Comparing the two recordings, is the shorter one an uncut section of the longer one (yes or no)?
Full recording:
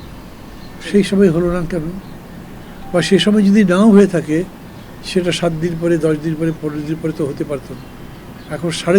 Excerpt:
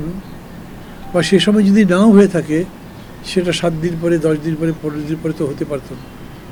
yes